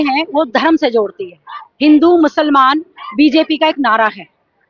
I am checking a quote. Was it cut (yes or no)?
no